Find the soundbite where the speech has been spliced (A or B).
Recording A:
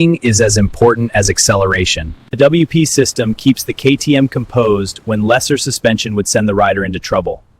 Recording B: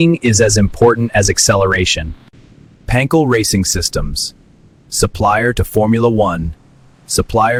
A